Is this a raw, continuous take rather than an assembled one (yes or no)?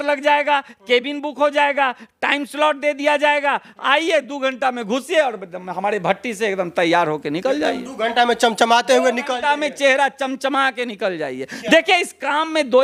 yes